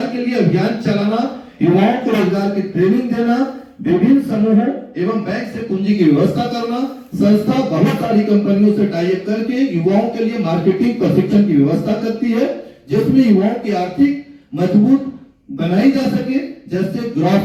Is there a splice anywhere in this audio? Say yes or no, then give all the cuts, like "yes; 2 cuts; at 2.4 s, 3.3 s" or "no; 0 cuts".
no; 0 cuts